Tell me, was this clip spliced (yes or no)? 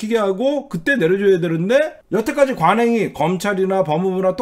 yes